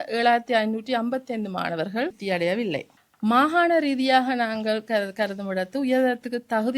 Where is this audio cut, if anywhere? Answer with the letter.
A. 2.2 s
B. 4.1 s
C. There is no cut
A